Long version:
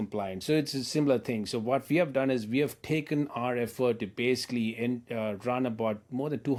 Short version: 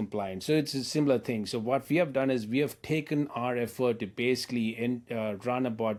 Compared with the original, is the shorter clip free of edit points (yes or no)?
yes